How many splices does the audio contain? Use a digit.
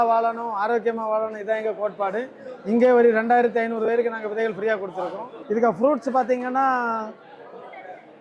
1